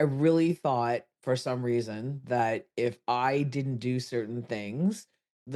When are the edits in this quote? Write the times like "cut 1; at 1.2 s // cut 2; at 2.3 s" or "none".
none